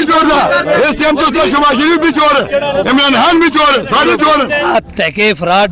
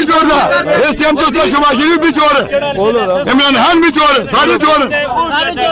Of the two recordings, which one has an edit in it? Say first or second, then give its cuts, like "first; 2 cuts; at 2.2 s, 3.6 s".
first; 2 cuts; at 2.8 s, 4.6 s